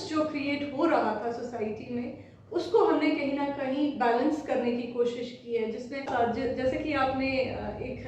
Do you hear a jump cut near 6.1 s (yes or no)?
yes